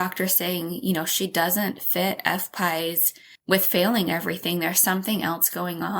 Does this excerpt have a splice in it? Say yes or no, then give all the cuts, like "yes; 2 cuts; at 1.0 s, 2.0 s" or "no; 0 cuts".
no; 0 cuts